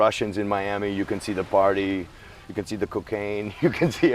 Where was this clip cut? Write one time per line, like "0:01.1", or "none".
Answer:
none